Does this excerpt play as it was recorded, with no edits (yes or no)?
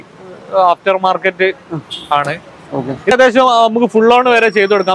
no